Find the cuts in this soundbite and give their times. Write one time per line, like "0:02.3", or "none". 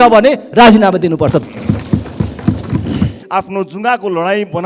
0:01.4
0:03.2